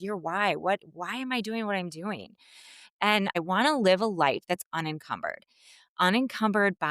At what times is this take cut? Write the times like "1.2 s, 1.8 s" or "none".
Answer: 3.4 s